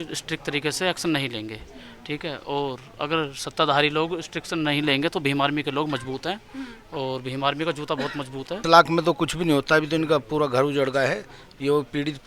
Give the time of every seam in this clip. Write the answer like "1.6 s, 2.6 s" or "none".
8.6 s

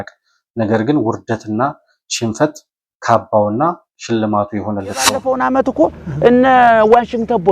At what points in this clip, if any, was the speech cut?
5.2 s

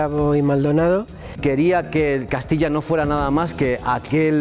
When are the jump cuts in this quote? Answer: 1.2 s

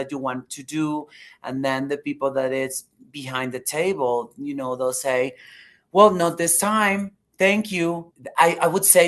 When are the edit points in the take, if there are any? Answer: 8.2 s

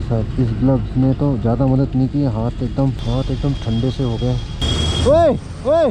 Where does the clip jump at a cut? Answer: 3.0 s, 4.6 s

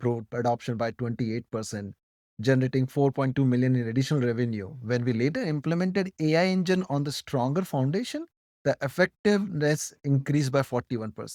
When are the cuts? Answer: none

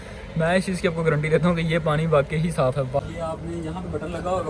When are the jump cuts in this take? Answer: 3.0 s

